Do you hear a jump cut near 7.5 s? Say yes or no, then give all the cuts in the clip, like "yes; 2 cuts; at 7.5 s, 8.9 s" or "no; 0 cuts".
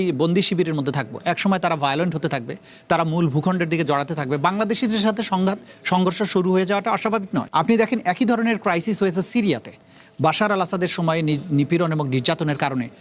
yes; 1 cut; at 7.5 s